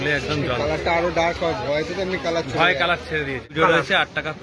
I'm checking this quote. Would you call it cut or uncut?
cut